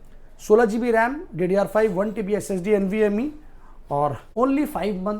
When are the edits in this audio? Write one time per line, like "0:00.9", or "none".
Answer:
0:04.2